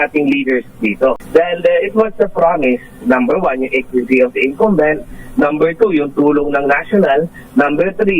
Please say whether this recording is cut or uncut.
cut